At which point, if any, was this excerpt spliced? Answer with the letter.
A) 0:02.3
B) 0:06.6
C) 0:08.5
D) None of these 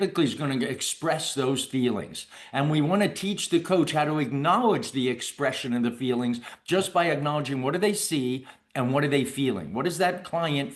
D